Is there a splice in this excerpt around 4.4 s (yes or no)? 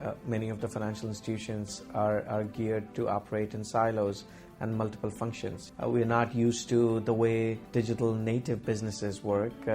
no